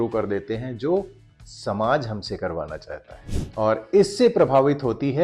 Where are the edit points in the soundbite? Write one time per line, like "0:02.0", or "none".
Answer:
0:03.3